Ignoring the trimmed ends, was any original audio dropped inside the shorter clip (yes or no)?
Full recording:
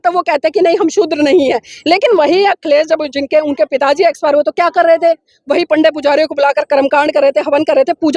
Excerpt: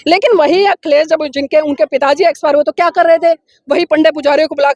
no